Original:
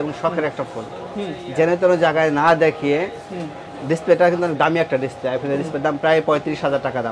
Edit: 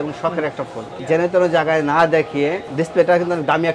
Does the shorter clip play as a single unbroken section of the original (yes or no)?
no